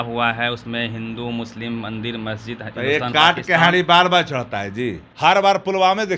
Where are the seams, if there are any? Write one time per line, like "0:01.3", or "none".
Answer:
0:05.1

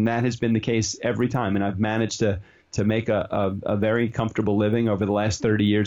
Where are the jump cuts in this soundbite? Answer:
none

